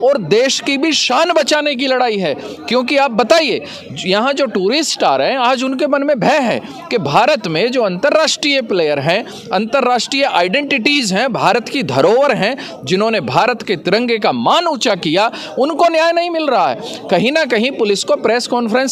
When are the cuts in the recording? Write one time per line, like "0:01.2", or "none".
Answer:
none